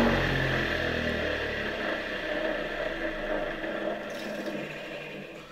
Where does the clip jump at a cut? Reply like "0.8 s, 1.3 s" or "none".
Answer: none